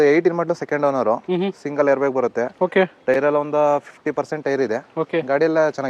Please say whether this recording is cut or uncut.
uncut